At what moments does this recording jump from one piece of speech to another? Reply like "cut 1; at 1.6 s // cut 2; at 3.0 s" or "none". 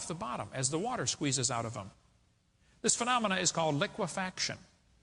cut 1; at 4.0 s

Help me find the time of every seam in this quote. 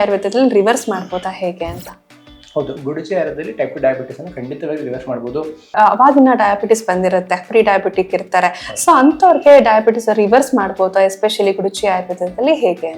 cut 1; at 5.7 s

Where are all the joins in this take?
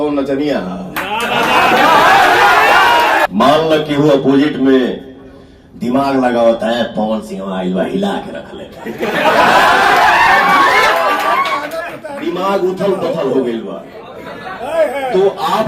cut 1; at 3.3 s

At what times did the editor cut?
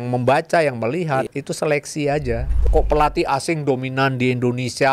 cut 1; at 1.3 s // cut 2; at 2.6 s

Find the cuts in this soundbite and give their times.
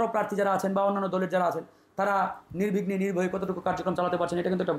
none

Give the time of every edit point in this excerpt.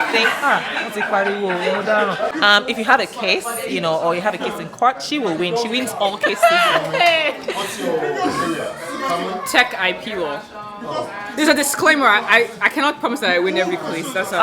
cut 1; at 2.3 s

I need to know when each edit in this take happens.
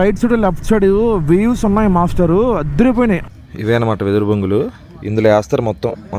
cut 1; at 3.3 s

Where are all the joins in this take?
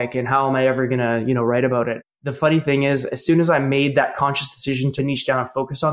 cut 1; at 2.0 s // cut 2; at 4.9 s

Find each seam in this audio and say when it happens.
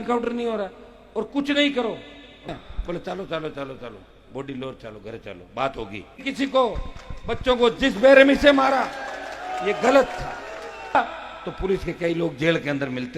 cut 1; at 2.5 s // cut 2; at 6.2 s // cut 3; at 10.9 s

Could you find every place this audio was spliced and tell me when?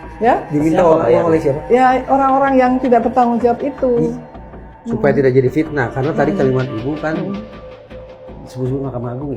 none

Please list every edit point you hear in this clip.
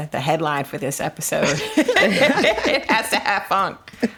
none

